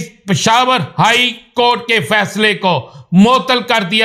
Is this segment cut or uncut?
uncut